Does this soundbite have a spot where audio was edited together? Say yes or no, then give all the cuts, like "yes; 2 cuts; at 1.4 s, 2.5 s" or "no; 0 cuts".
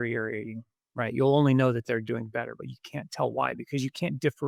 no; 0 cuts